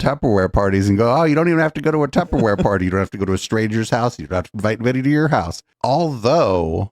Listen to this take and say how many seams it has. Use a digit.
1